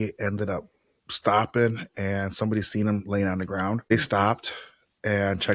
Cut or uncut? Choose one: cut